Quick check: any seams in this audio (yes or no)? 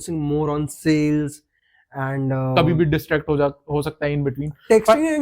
yes